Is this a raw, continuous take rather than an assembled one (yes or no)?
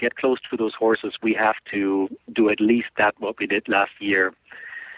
yes